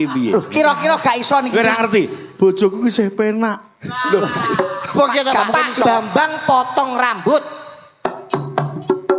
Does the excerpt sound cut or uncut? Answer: cut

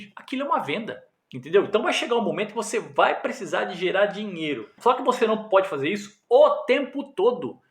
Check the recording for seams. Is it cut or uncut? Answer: cut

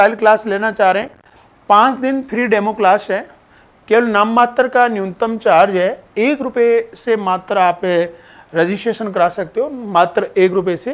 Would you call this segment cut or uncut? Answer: uncut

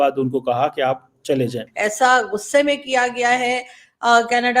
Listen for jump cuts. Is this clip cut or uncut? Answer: cut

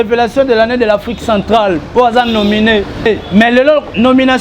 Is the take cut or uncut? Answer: cut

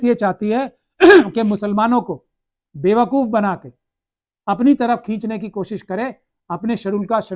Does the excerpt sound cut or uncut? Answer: uncut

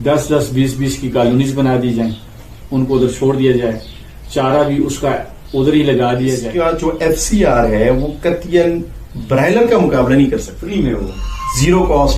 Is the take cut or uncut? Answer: cut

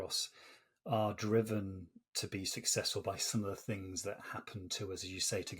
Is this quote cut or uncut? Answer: uncut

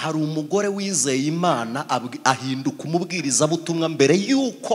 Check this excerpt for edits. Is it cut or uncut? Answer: uncut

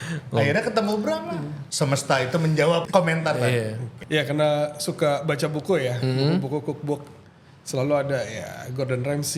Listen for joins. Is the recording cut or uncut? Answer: cut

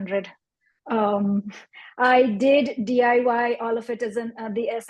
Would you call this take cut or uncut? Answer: uncut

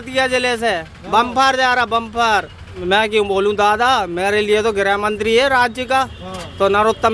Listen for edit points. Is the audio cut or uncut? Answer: cut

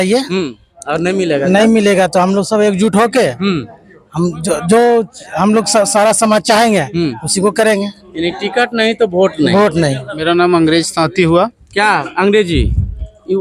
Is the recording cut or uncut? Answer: cut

